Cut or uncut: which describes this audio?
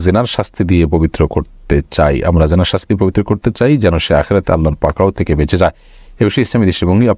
uncut